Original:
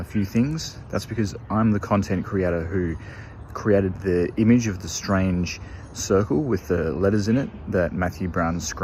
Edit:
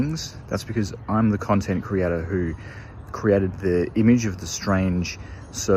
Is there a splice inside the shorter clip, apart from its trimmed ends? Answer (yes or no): no